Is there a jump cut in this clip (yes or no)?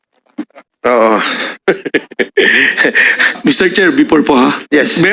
yes